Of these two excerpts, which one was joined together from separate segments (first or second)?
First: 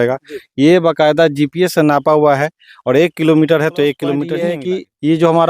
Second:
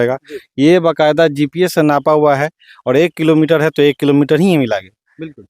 first